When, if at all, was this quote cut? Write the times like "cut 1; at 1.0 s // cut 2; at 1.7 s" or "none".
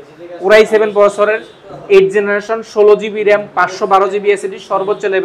none